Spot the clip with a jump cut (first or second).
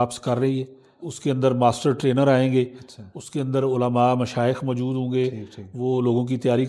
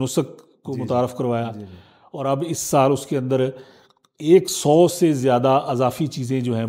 first